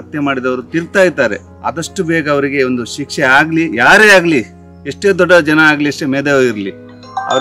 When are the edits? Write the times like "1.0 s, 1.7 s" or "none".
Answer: 1.5 s